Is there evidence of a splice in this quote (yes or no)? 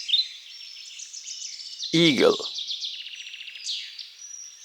yes